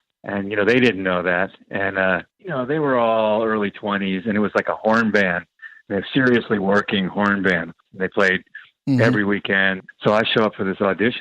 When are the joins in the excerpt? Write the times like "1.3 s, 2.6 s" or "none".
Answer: 2.3 s, 7.8 s, 9.9 s